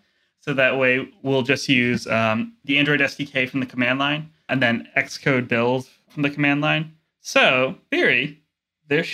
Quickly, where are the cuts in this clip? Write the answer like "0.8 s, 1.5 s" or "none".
2.6 s, 4.5 s, 7.8 s